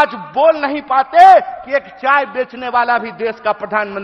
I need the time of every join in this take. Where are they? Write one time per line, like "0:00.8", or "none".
none